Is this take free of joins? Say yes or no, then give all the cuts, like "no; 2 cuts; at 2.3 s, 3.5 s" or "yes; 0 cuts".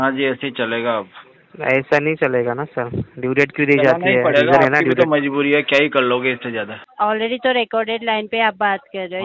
no; 1 cut; at 6.8 s